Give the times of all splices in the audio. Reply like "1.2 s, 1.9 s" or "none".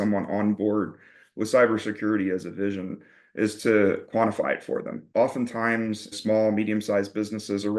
5.0 s, 6.1 s